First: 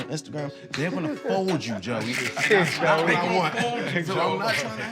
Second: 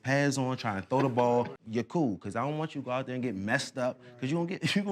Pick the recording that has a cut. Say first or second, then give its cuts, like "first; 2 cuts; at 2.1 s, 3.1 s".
second; 1 cut; at 1.6 s